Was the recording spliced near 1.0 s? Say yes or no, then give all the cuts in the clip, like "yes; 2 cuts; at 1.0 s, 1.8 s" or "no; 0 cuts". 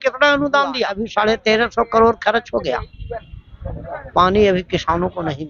yes; 1 cut; at 1.0 s